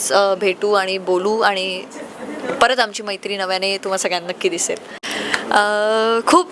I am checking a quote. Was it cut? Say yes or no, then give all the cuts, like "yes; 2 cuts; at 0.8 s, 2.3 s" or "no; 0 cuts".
yes; 1 cut; at 5.0 s